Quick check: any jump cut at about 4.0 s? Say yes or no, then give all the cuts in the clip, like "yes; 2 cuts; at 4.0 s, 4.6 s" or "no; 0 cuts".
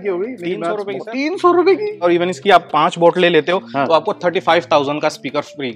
no; 1 cut; at 1.9 s